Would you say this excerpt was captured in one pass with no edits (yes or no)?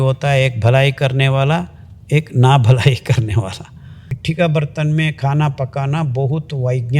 no